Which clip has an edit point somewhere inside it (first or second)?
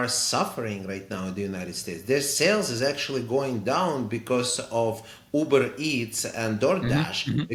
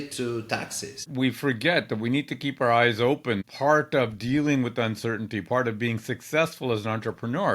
second